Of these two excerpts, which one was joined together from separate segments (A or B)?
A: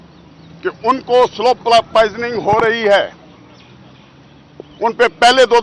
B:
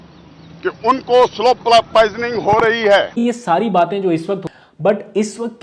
B